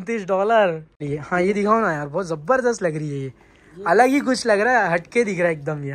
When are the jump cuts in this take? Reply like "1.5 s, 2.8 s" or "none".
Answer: 1.1 s